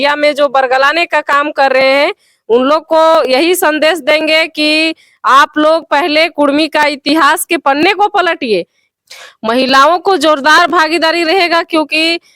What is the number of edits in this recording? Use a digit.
1